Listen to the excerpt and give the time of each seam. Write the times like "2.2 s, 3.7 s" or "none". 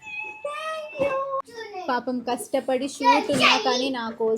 1.4 s